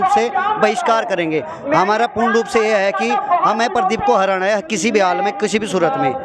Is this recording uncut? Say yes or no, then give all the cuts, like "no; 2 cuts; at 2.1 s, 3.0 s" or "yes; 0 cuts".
yes; 0 cuts